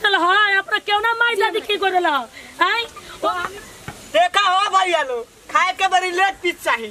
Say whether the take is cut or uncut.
cut